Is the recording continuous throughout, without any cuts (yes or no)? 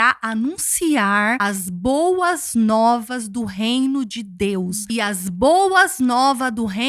no